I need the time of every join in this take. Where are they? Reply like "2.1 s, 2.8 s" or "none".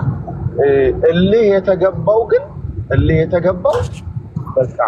none